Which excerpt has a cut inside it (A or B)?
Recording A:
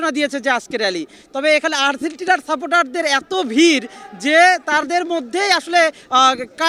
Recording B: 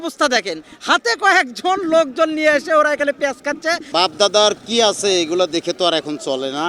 B